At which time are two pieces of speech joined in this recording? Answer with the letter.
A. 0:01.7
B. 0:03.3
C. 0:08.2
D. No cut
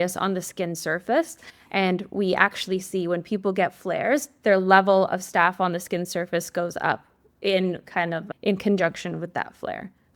C